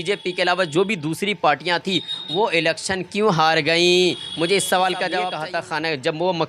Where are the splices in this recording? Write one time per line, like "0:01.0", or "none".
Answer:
0:05.4